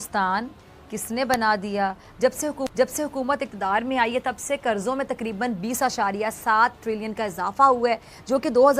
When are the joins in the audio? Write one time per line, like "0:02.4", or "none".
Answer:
none